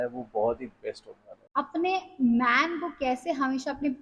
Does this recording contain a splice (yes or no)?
yes